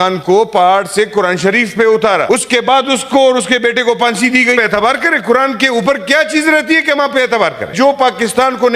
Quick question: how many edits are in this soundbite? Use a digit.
3